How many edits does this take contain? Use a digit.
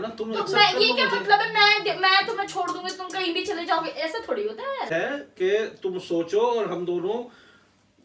1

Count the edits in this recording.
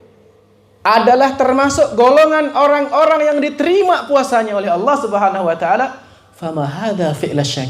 0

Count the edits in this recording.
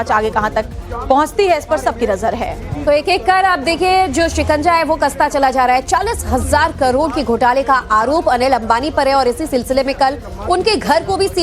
1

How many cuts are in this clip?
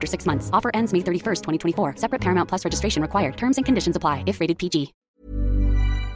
1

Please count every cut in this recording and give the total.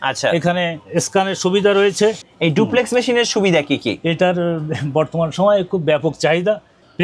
1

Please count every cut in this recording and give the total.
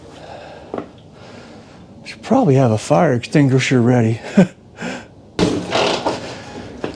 1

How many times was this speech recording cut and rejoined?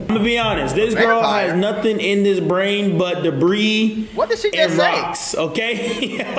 0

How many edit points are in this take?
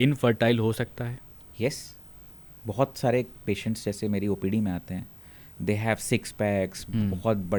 0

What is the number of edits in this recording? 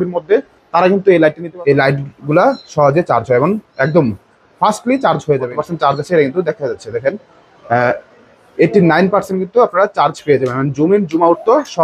2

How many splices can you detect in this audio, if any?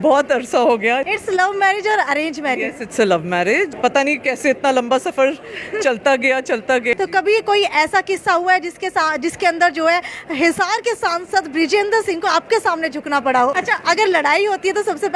4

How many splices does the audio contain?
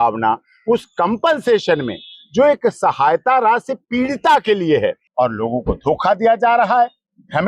1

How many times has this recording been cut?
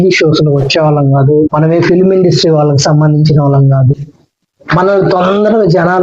1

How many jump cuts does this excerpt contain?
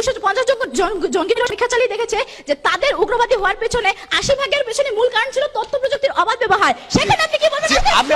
1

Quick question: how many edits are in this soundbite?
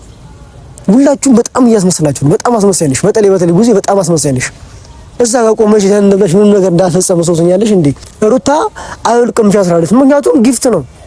1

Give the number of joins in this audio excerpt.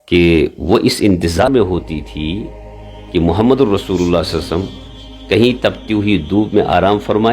1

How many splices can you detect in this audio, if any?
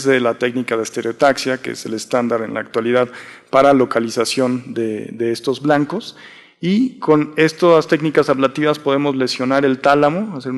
1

